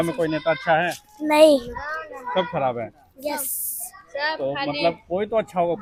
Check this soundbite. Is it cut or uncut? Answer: uncut